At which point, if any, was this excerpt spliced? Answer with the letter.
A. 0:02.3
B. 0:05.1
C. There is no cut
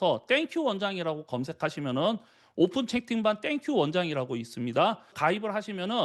B